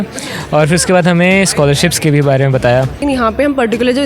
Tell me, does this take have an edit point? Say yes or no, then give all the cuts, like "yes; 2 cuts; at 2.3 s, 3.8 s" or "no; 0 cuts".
yes; 1 cut; at 3.0 s